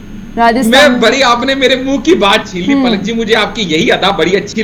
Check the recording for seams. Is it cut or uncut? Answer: uncut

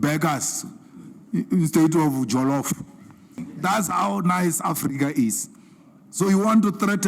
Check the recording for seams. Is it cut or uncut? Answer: cut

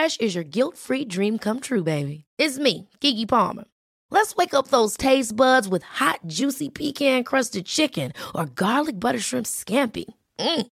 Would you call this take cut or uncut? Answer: uncut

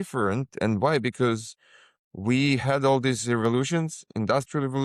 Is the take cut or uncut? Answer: uncut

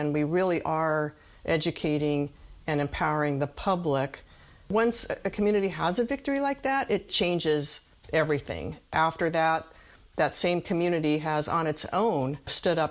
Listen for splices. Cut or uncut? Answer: uncut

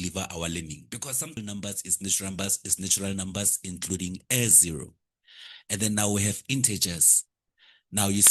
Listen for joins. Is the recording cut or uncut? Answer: cut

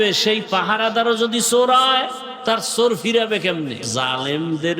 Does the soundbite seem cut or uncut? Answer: cut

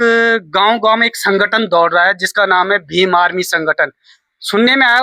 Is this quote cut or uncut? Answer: uncut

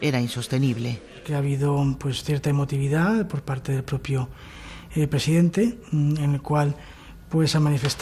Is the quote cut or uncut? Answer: uncut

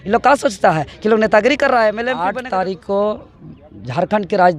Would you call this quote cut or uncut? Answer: cut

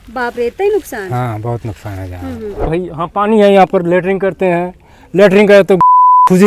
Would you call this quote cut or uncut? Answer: cut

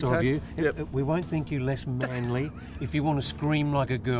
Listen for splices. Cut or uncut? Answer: uncut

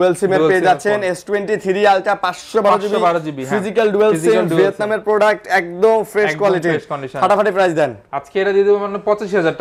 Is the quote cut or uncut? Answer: uncut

